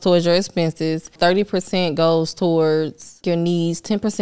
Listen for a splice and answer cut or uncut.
cut